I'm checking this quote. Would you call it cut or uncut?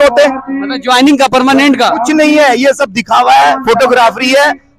uncut